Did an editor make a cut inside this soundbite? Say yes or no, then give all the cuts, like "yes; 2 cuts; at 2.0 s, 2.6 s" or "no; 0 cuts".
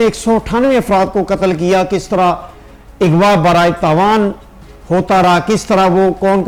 no; 0 cuts